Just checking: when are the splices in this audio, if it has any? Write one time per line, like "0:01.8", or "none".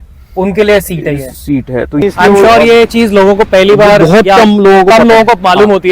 0:02.0